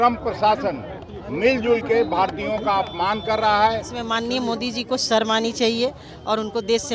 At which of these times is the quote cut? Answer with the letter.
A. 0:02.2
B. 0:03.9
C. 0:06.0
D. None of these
B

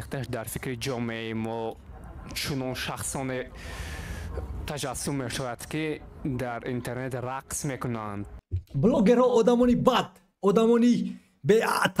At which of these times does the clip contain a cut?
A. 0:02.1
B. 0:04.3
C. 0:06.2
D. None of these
D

